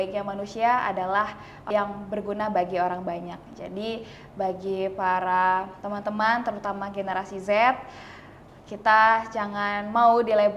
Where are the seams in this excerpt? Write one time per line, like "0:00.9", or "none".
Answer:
0:01.6

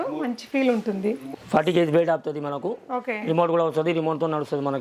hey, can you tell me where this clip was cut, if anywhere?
0:01.3

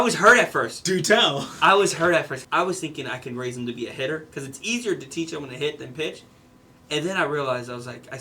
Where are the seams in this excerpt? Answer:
0:02.4

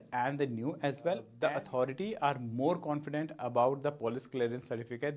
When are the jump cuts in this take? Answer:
0:01.3

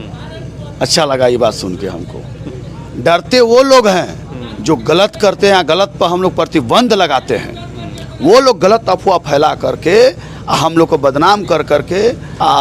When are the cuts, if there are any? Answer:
none

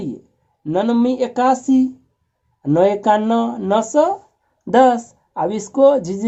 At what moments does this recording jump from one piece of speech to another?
none

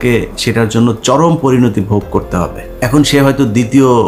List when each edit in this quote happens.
0:02.6

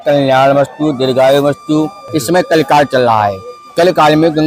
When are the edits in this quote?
0:02.0

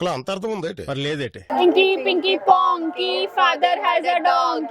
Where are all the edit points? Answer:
0:01.4

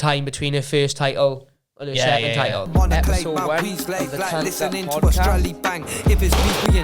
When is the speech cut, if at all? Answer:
0:02.7

